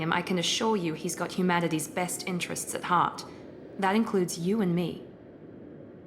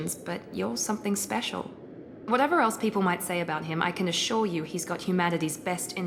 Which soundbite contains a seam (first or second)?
first